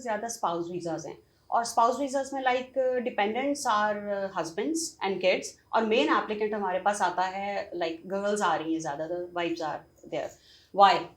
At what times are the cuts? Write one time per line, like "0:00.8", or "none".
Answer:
none

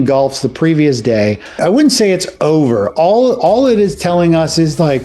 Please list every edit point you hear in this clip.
0:01.6

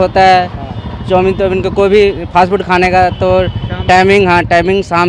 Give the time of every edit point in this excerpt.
none

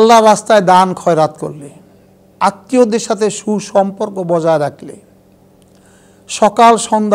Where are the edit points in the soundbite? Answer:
0:02.3

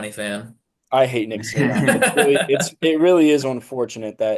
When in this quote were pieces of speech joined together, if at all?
none

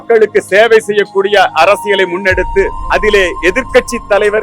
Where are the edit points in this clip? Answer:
0:02.8

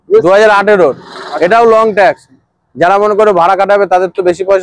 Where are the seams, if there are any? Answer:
none

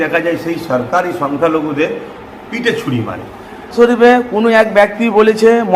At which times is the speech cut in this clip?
0:03.6

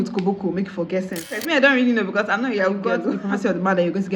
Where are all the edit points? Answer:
0:01.4
0:03.1

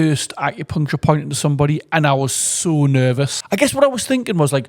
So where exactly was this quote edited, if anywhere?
0:03.4

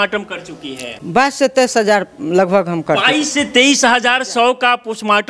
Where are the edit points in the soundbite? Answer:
0:00.9

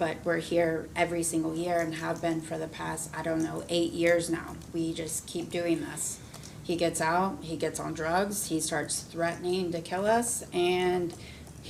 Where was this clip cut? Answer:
none

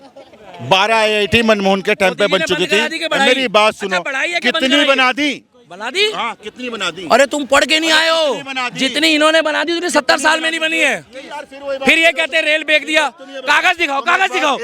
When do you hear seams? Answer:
none

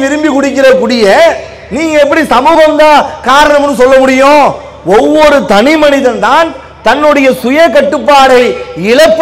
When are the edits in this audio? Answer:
none

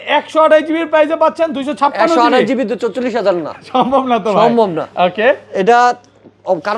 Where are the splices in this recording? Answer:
none

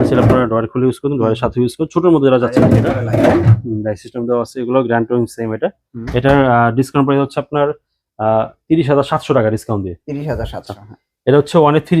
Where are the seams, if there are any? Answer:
none

